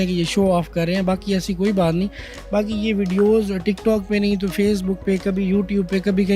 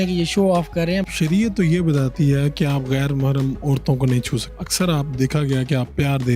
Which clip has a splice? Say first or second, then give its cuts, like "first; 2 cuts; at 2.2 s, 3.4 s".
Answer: second; 2 cuts; at 1.0 s, 4.6 s